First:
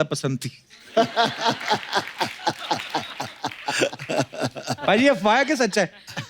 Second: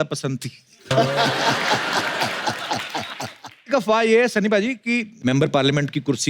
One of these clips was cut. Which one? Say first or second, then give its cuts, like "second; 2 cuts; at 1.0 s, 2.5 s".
second; 1 cut; at 3.6 s